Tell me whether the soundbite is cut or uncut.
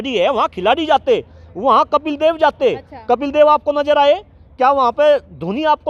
uncut